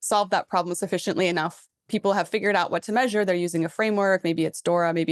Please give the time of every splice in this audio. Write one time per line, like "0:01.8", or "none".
none